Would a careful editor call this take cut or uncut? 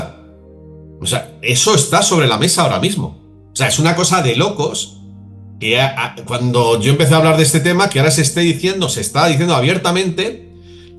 uncut